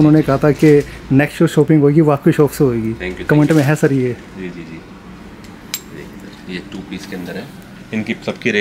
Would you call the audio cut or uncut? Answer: uncut